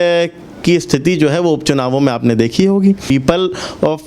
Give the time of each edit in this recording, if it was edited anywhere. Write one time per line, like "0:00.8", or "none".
0:03.0